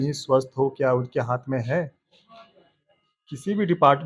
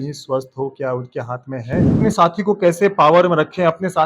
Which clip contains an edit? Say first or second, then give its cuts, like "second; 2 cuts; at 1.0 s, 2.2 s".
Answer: second; 1 cut; at 1.9 s